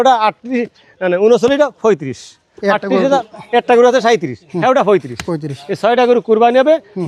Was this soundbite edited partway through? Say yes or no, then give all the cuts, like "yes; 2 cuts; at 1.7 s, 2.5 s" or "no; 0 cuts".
no; 0 cuts